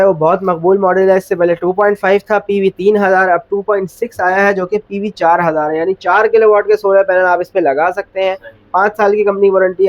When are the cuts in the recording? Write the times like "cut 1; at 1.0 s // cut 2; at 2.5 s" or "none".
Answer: none